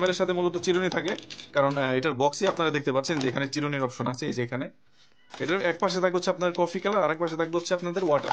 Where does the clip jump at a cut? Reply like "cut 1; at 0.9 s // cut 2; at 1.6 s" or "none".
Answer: cut 1; at 5.1 s